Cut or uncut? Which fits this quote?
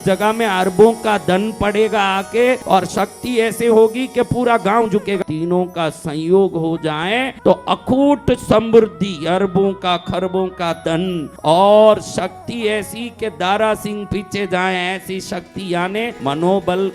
cut